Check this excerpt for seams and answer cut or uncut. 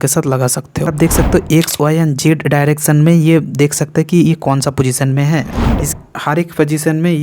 cut